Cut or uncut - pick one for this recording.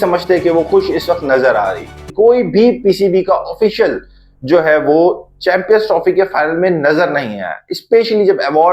cut